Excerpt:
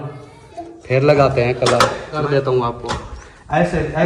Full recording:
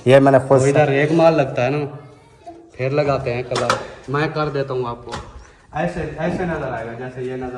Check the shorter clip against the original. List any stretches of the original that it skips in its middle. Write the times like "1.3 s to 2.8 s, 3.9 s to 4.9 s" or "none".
4.1 s to 4.4 s